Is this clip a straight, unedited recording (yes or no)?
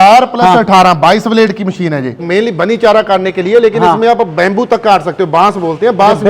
no